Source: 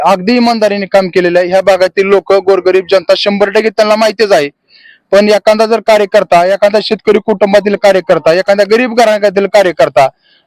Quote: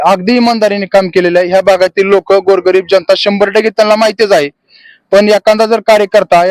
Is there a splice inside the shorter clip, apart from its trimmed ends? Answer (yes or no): no